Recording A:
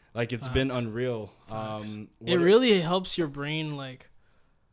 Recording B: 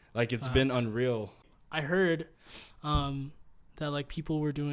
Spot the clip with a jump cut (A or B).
B